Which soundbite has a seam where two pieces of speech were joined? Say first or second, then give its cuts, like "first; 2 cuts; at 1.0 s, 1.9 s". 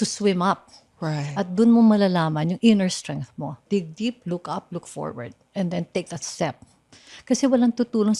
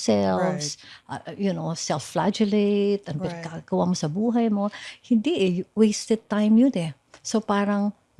first; 1 cut; at 3.6 s